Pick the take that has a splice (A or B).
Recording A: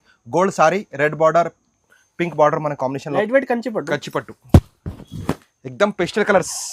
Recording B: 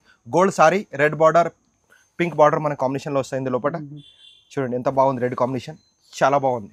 A